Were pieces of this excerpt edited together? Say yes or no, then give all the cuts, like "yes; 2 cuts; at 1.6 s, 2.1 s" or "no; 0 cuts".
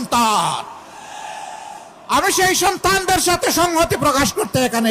no; 0 cuts